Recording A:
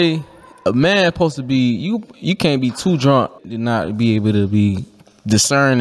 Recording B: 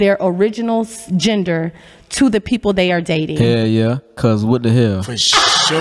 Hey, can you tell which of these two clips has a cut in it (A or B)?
A